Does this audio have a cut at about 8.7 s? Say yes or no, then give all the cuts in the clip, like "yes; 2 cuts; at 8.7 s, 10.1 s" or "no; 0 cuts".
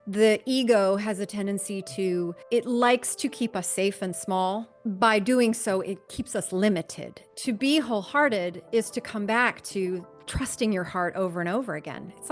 no; 3 cuts; at 2.4 s, 4.7 s, 7.3 s